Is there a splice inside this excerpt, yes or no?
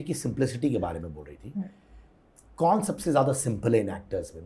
no